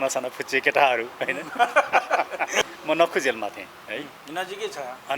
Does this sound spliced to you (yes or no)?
yes